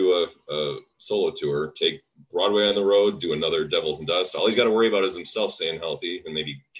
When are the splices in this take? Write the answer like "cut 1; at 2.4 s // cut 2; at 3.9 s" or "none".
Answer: none